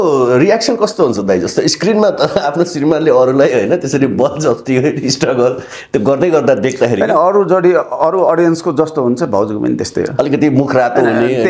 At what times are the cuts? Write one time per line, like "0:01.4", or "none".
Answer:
none